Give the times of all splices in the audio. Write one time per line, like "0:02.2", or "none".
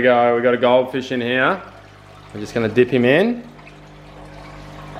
none

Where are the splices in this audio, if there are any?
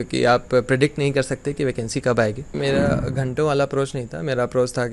0:02.5

